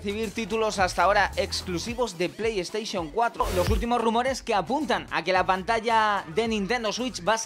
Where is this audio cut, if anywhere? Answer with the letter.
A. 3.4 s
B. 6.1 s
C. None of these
A